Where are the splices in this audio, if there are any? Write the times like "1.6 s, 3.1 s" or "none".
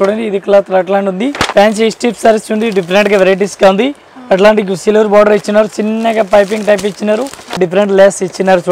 1.4 s, 7.5 s